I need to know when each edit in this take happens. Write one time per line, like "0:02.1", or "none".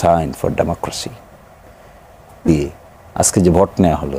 0:02.5